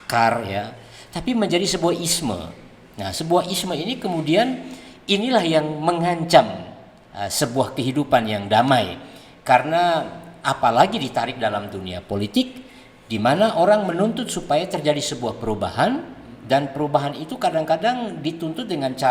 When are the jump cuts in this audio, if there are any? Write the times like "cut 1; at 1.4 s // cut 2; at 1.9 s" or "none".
none

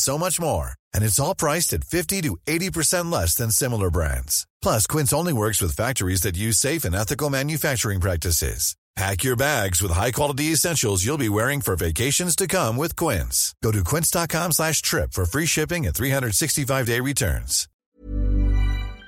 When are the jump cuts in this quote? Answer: cut 1; at 17.7 s

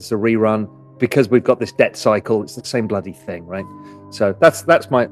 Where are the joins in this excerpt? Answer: none

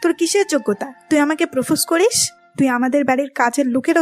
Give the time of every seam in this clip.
none

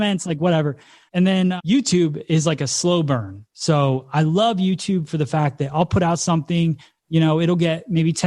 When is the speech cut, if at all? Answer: cut 1; at 1.2 s

